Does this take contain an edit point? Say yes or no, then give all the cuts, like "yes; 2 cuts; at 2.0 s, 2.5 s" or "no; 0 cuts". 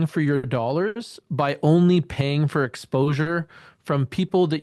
no; 0 cuts